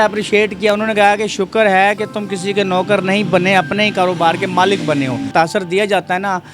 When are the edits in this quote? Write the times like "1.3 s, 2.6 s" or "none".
5.3 s